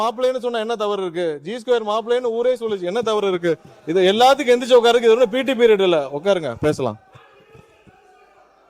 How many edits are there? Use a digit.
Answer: 0